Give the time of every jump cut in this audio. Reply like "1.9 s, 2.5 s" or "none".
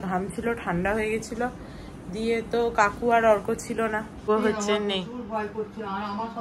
4.3 s